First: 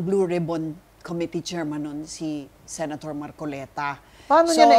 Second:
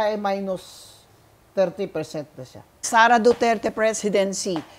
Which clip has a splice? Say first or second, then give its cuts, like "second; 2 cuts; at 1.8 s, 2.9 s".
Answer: second; 1 cut; at 2.8 s